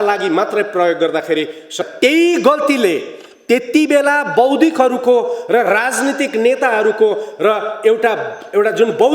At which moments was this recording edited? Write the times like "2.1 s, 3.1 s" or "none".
1.8 s